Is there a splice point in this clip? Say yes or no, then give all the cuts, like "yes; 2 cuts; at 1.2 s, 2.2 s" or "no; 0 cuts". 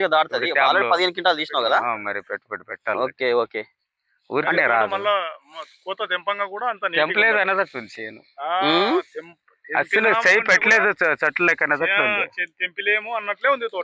no; 0 cuts